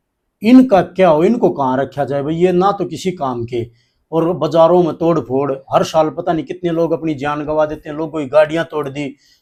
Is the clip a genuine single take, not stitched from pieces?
yes; 0 cuts

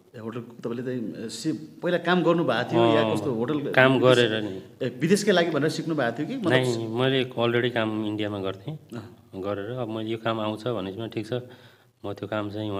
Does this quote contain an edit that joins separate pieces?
no; 0 cuts

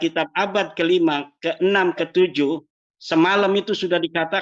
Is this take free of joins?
yes; 0 cuts

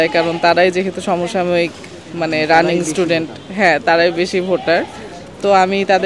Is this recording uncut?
yes; 0 cuts

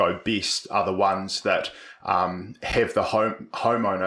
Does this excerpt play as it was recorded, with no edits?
yes; 0 cuts

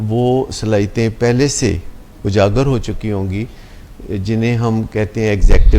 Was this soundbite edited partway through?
no; 0 cuts

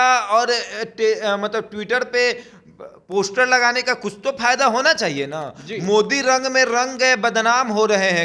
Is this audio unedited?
yes; 0 cuts

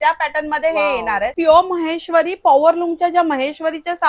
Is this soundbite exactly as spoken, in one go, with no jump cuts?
no; 1 cut; at 1.3 s

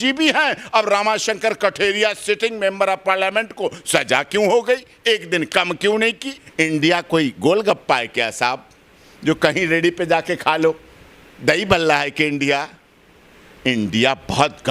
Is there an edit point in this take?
yes; 1 cut; at 6.4 s

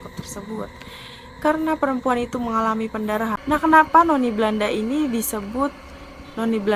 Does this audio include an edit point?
yes; 1 cut; at 3.4 s

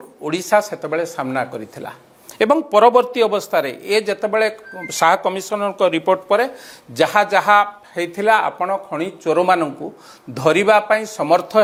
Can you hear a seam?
no; 0 cuts

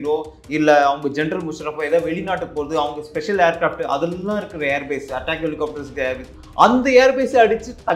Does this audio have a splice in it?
no; 0 cuts

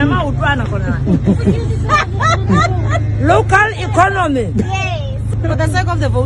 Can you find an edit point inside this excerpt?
yes; 1 cut; at 5.3 s

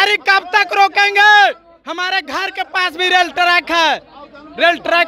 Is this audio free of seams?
yes; 0 cuts

